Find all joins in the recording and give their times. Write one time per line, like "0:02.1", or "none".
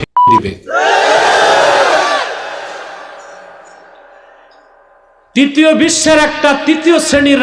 none